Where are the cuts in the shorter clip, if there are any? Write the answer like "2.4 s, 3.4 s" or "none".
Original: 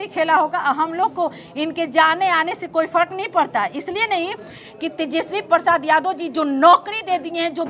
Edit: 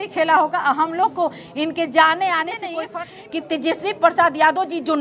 2.8 s

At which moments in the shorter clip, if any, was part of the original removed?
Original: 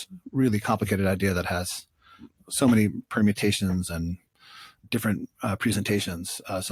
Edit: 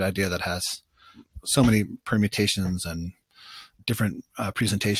none

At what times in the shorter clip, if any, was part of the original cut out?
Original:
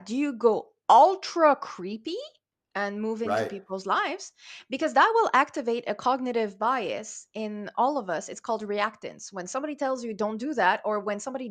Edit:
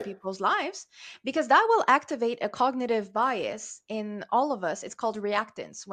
none

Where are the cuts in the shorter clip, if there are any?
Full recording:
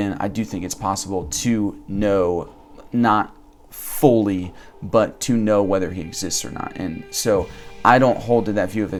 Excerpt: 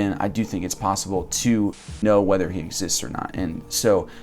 2.0 s

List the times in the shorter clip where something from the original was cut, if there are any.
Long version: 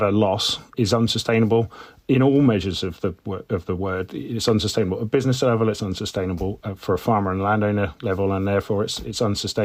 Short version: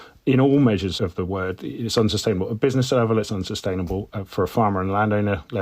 0.9 s

